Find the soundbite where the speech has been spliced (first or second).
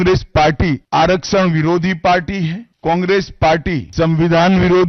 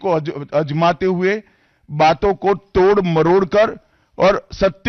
first